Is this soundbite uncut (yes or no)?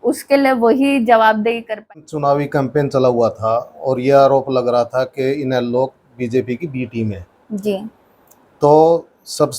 no